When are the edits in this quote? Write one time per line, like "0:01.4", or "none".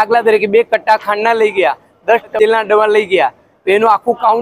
0:02.3

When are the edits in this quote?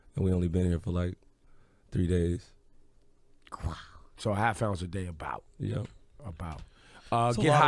0:06.7

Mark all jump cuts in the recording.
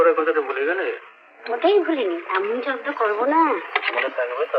none

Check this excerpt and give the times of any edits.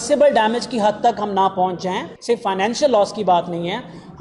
0:02.1

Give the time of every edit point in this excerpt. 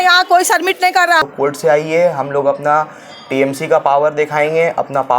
0:01.2

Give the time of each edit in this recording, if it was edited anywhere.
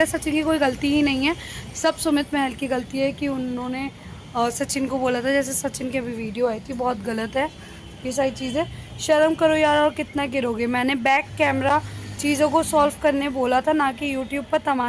none

